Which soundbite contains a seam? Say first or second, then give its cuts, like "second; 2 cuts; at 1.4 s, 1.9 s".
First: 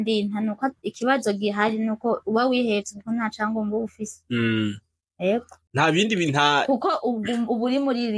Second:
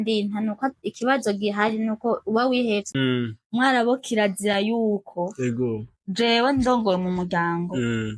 second; 1 cut; at 2.9 s